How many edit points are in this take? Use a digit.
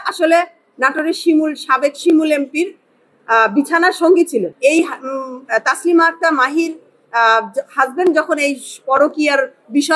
1